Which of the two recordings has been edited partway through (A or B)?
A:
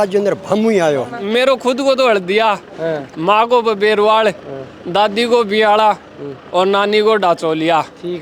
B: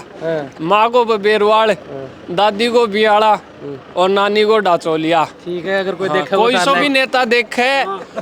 A